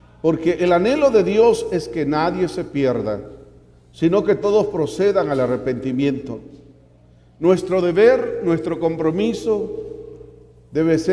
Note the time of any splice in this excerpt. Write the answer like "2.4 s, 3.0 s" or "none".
9.1 s